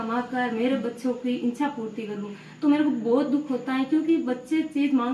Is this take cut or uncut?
uncut